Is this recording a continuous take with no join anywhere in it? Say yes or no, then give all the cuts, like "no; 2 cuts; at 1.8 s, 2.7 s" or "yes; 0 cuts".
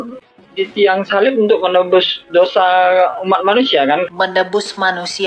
no; 1 cut; at 4.1 s